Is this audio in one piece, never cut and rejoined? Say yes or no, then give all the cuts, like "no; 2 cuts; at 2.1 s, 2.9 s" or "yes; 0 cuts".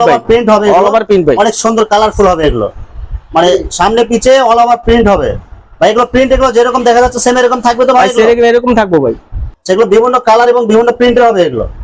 yes; 0 cuts